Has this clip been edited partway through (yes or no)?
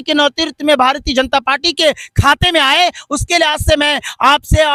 no